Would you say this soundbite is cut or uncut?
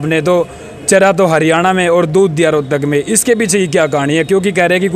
uncut